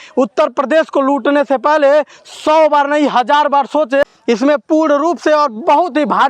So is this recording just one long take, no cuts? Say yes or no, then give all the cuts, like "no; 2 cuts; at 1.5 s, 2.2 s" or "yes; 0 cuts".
no; 1 cut; at 4.1 s